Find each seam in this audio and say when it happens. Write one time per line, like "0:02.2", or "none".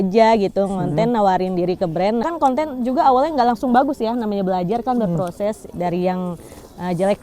0:02.2